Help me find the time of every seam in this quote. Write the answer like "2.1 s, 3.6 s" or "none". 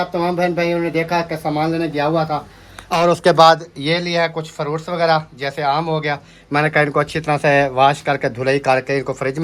none